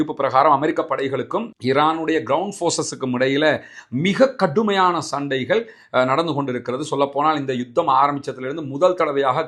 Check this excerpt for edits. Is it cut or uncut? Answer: uncut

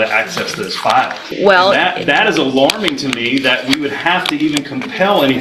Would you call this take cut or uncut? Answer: cut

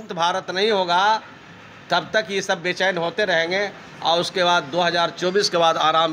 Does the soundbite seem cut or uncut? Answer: cut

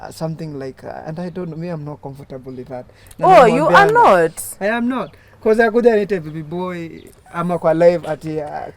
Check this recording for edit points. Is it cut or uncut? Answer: uncut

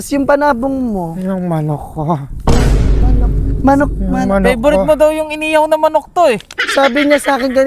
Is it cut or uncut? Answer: uncut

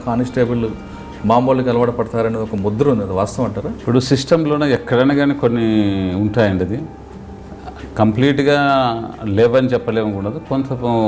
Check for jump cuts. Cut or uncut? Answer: cut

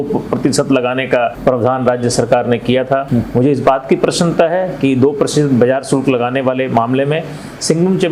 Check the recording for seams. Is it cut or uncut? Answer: cut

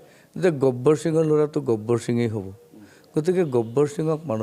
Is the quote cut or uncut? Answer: uncut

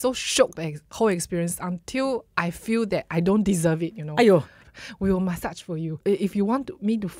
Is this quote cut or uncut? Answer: cut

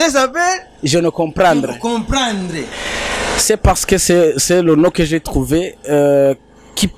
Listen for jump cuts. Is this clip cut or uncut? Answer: cut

